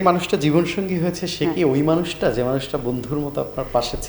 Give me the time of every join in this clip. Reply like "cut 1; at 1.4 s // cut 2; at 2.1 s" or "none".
none